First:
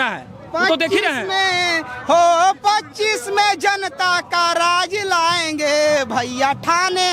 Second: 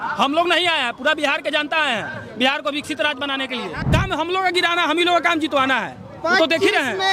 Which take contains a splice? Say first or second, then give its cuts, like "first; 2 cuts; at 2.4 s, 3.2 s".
second; 1 cut; at 3.8 s